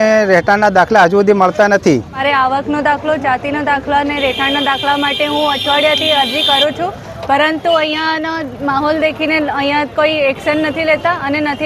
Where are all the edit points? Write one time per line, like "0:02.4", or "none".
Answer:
0:02.2